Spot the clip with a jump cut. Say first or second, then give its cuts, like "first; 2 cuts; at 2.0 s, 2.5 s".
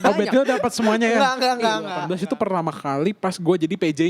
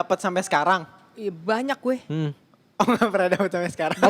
first; 1 cut; at 2.0 s